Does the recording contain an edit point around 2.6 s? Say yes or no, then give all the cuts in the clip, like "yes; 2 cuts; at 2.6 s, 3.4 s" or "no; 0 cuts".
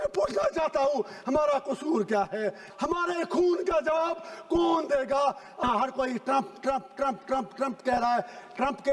yes; 2 cuts; at 2.6 s, 5.6 s